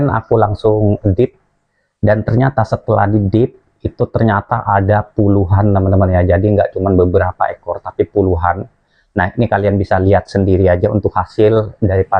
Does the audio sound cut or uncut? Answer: uncut